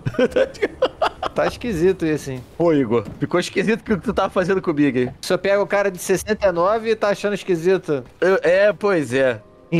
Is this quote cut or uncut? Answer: cut